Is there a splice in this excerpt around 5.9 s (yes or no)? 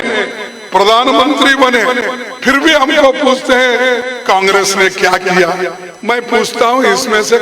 yes